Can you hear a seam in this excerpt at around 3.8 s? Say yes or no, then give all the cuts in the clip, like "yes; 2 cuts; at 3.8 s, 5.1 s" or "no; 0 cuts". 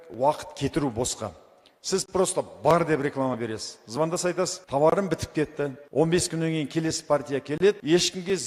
no; 0 cuts